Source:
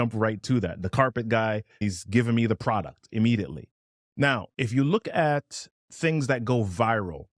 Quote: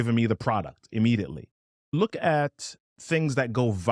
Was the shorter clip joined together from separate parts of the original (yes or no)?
yes